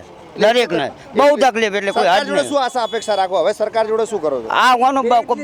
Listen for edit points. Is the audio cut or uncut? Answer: uncut